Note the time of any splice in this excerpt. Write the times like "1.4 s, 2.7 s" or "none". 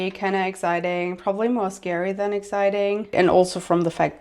3.1 s